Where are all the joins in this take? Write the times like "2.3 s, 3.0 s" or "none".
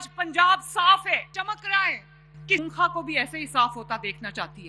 1.3 s, 2.6 s